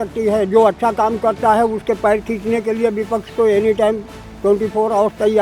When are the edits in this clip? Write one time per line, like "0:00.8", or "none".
none